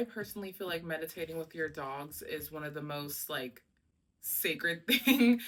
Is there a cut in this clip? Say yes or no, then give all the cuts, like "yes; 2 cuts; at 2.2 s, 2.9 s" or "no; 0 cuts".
no; 0 cuts